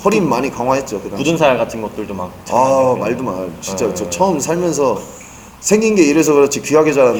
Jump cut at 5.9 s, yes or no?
no